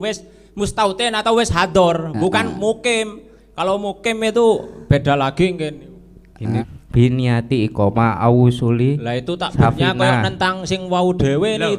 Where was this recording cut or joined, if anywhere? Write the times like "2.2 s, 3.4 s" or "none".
6.6 s